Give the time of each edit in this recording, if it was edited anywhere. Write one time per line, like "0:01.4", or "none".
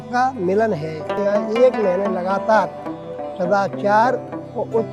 0:01.0